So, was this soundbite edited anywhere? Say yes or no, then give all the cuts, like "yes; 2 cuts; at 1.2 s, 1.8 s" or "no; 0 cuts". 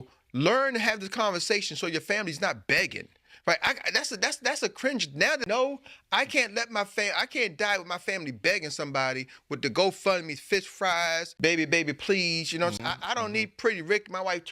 yes; 1 cut; at 11.3 s